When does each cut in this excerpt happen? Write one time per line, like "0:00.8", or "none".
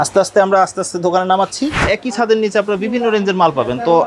0:01.9